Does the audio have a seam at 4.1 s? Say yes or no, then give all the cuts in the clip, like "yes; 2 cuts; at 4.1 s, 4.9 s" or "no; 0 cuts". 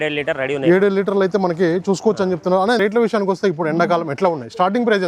no; 1 cut; at 2.8 s